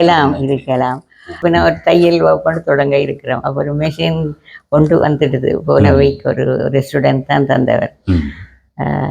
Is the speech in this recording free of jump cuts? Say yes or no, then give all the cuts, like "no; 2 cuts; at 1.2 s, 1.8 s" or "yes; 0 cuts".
no; 1 cut; at 1.2 s